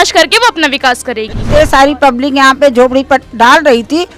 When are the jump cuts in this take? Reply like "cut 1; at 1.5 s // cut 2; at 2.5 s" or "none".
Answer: cut 1; at 1.5 s